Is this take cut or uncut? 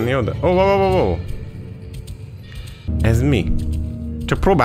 cut